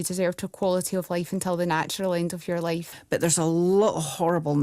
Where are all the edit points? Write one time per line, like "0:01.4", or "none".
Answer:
0:02.9